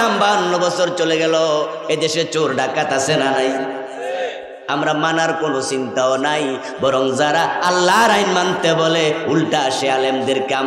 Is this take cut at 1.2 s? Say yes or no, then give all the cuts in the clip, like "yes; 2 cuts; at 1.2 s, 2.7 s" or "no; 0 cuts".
no; 0 cuts